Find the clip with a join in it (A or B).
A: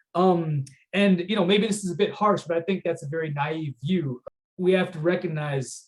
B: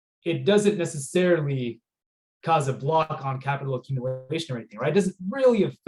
A